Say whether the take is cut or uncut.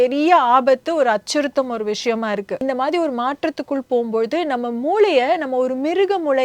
cut